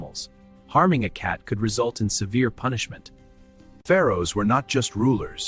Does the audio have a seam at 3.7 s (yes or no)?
yes